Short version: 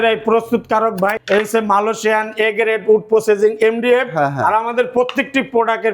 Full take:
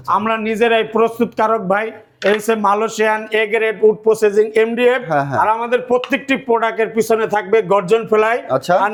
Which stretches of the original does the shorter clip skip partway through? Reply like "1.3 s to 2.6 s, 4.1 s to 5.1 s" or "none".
1.9 s to 2.1 s